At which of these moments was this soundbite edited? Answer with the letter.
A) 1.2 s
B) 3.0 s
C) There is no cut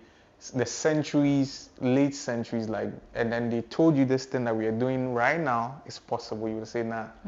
C